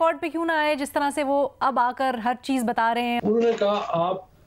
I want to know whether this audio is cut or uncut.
cut